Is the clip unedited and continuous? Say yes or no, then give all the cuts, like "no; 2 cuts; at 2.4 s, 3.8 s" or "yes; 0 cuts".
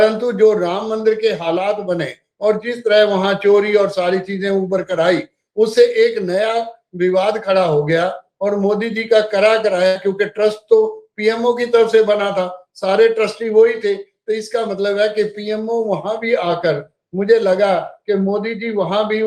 yes; 0 cuts